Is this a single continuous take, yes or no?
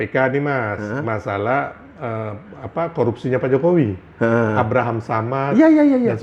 yes